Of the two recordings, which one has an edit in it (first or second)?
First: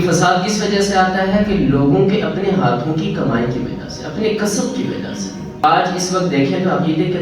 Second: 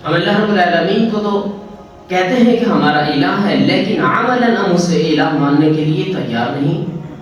first